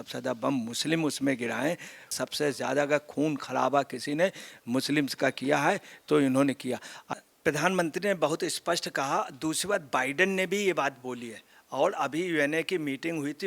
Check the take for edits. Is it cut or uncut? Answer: cut